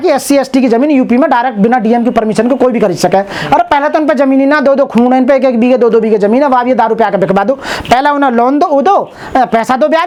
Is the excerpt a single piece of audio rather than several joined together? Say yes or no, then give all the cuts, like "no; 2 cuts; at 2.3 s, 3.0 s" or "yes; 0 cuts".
yes; 0 cuts